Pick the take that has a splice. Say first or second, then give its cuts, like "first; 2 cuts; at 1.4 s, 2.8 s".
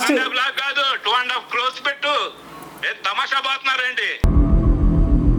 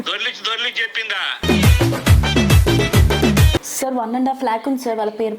second; 1 cut; at 3.7 s